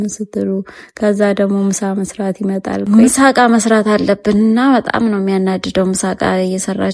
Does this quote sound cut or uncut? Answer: cut